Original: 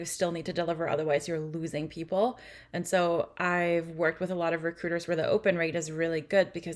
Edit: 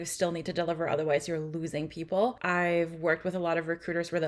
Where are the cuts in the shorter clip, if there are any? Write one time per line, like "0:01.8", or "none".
0:02.4